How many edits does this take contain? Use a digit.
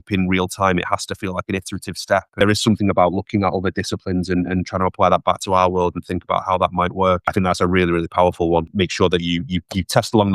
3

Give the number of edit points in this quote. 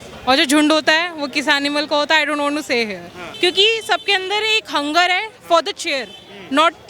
1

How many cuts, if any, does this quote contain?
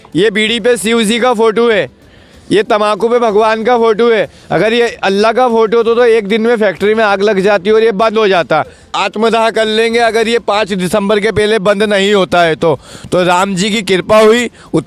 1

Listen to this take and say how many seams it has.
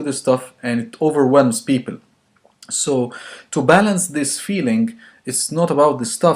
1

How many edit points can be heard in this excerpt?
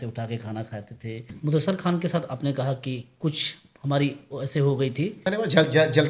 2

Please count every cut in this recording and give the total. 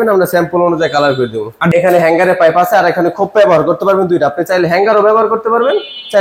1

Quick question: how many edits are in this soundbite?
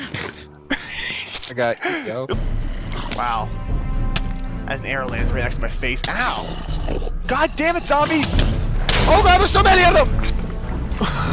0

